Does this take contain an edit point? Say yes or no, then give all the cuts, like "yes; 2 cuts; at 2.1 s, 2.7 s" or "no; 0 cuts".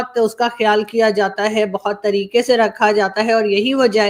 no; 0 cuts